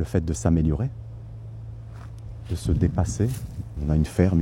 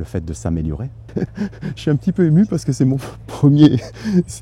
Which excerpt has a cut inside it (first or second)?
second